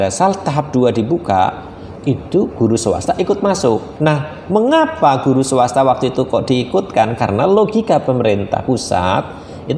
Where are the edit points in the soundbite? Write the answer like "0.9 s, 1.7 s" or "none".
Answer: 3.9 s